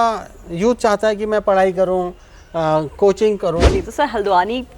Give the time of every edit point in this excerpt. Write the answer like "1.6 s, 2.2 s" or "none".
3.8 s